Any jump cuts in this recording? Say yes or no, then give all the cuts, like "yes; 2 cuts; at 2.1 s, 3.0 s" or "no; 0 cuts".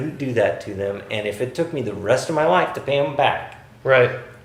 no; 0 cuts